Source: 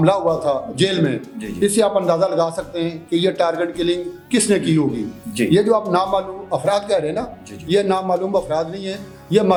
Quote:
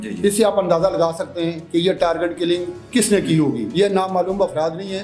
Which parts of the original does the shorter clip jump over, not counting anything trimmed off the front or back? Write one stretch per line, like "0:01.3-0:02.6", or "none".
0:05.0-0:07.6